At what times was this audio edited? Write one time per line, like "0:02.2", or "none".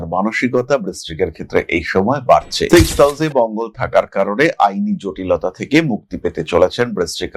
none